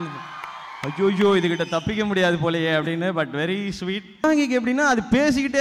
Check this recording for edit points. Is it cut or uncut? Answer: cut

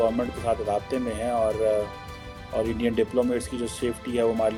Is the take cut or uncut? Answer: uncut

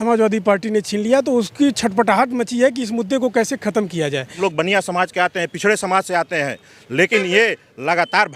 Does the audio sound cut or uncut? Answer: cut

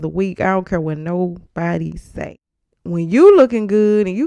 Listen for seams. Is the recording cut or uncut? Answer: cut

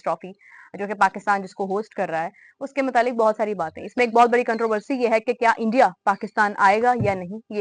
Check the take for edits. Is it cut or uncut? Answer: uncut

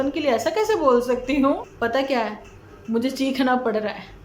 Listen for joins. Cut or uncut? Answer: cut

